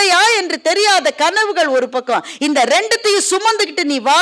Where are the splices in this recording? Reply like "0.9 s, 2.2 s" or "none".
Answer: none